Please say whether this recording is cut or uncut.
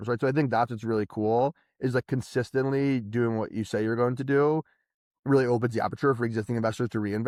uncut